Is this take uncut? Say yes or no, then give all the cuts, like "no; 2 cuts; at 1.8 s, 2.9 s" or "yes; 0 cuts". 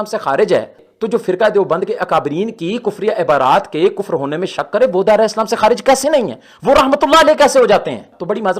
no; 1 cut; at 6.4 s